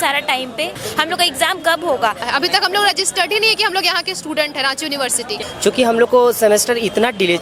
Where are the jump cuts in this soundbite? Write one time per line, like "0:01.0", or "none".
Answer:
0:00.8
0:02.3
0:05.4